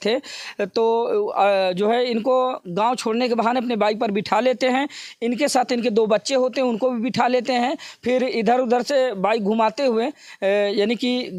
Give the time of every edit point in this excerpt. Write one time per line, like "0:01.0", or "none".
none